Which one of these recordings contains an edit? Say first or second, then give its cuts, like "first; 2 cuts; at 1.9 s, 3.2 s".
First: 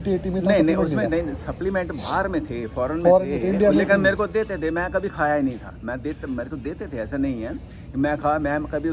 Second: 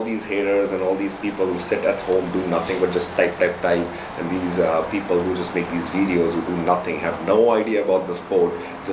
second; 1 cut; at 1.0 s